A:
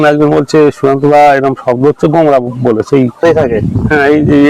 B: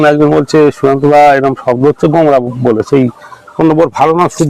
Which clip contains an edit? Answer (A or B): A